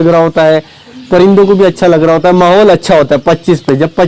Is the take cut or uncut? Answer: uncut